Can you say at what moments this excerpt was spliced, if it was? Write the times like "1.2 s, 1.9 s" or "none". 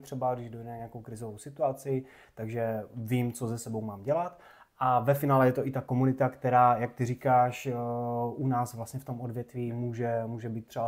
none